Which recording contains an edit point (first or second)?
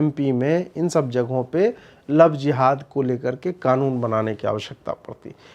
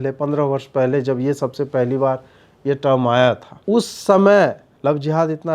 second